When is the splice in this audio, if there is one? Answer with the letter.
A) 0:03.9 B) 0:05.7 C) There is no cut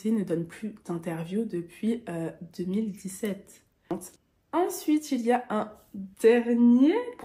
A